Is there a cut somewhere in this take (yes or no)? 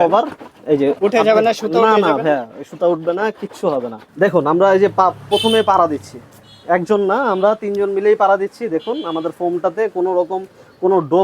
yes